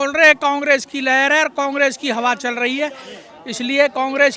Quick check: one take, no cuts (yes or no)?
yes